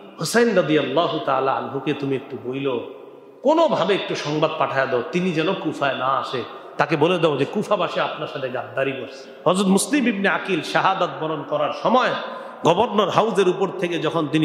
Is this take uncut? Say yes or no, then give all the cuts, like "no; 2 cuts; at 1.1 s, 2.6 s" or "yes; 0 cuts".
no; 1 cut; at 9.2 s